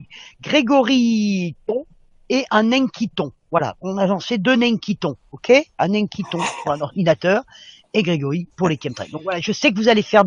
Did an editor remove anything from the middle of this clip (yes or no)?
yes